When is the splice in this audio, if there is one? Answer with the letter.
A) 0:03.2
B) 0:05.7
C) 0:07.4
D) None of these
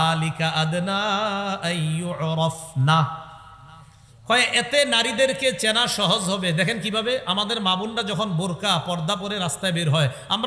D